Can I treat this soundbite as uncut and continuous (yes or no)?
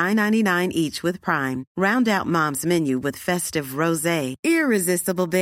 yes